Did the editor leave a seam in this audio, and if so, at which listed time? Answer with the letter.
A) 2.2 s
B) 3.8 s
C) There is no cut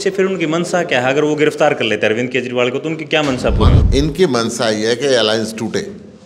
B